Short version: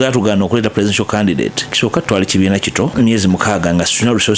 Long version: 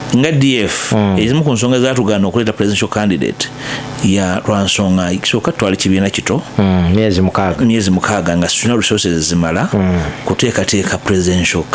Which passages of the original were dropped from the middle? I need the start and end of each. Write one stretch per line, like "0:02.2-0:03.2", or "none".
0:03.5-0:05.2
0:06.4-0:07.5

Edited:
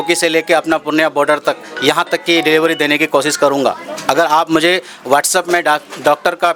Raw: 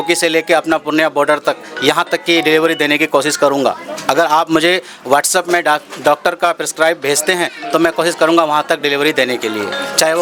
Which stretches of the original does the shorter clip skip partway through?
none

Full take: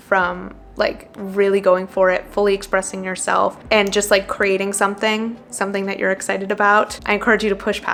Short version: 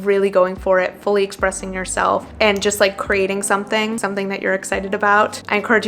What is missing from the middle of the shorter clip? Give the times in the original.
0:05.3-0:05.5

